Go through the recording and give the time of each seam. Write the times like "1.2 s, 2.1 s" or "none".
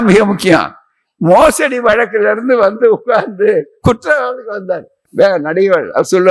5.0 s